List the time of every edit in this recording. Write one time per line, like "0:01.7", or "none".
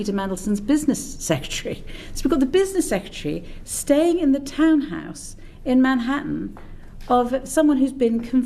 none